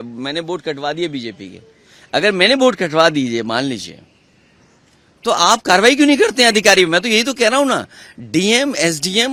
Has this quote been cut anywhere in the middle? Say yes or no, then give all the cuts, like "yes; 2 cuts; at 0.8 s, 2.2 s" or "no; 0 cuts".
no; 0 cuts